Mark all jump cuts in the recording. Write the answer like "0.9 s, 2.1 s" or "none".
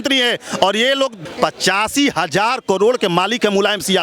1.2 s